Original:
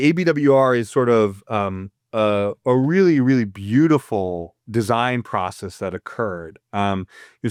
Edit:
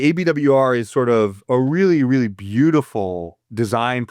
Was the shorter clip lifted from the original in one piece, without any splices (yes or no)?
no